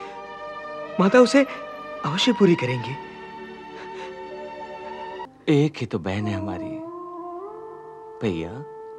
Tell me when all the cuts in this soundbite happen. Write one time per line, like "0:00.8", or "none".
0:05.3